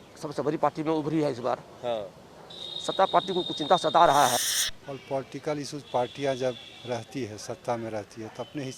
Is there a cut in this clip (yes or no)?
yes